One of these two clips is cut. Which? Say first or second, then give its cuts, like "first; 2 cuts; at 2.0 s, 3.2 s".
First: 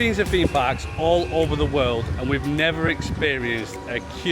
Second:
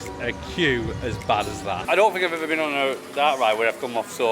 second; 1 cut; at 1.8 s